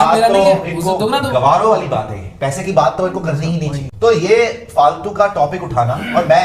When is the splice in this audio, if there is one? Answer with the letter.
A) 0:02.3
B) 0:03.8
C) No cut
B